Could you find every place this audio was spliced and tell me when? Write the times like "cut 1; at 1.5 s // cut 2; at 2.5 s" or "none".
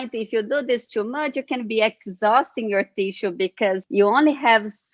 cut 1; at 3.8 s